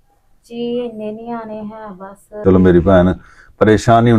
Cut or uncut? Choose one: cut